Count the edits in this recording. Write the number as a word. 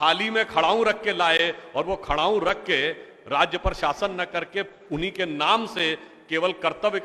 zero